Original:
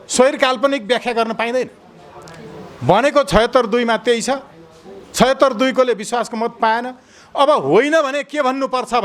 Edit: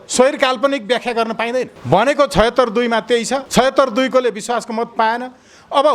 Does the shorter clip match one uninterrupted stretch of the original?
no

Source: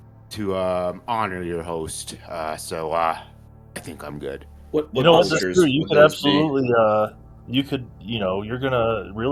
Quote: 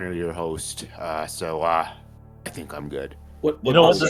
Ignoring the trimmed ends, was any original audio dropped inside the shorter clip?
no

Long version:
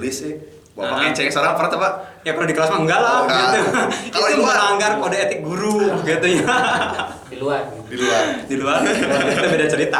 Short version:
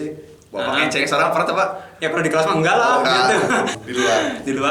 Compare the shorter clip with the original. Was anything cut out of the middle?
yes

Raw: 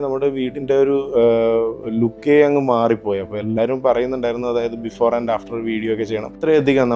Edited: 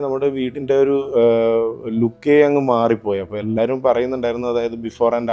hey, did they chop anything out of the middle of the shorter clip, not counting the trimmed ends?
no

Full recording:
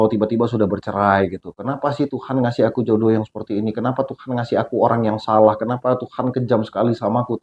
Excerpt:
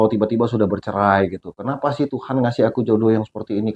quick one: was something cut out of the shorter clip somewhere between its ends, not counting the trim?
no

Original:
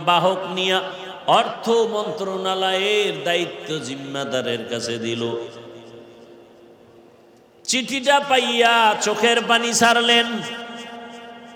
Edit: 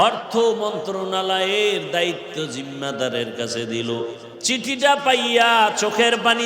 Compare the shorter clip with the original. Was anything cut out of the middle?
yes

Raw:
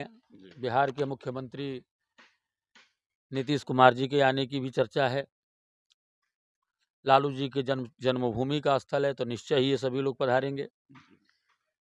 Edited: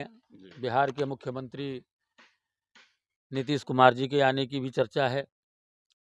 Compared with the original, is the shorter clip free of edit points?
yes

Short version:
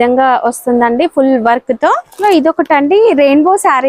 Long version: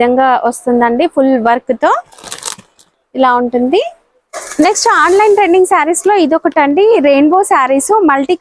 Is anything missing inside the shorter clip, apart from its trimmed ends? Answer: yes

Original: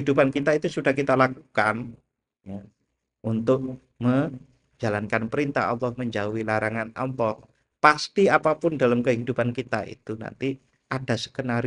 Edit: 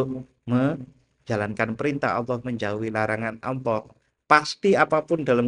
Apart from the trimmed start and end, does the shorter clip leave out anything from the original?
no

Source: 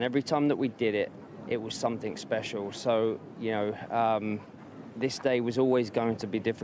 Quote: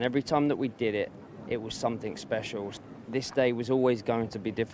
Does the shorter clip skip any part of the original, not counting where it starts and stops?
yes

